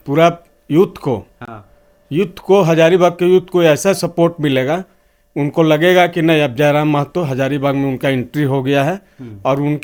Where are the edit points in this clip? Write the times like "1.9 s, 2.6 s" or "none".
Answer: none